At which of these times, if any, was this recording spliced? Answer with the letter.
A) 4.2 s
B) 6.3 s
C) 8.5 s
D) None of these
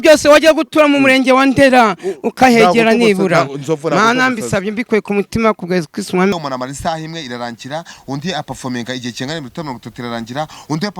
B